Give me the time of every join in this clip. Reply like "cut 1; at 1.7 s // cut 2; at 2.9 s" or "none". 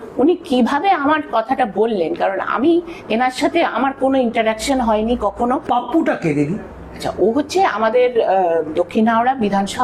cut 1; at 5.6 s